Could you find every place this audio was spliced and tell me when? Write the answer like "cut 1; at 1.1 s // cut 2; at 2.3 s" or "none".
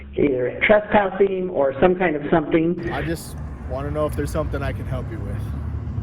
cut 1; at 2.9 s